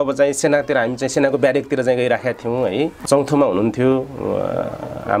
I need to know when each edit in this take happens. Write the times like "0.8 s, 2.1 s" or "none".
3.0 s